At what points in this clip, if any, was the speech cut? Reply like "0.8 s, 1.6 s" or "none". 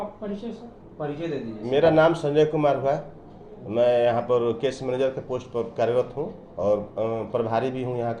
none